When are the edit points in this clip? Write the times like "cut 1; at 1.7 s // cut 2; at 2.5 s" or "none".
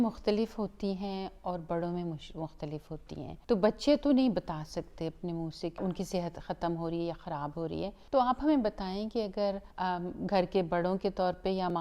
cut 1; at 3.4 s // cut 2; at 5.8 s // cut 3; at 8.0 s // cut 4; at 9.7 s